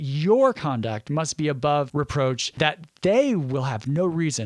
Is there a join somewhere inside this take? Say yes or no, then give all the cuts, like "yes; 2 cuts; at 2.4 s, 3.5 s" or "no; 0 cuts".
yes; 1 cut; at 2.1 s